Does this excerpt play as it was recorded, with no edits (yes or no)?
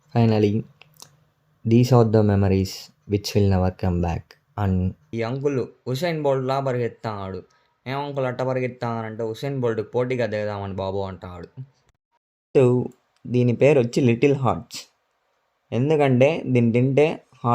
no